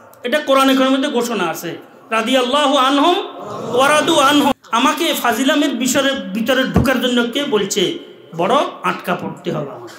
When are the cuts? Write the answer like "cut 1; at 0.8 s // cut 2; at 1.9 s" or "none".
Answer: cut 1; at 4.5 s